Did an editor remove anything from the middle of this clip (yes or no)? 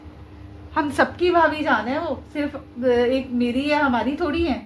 no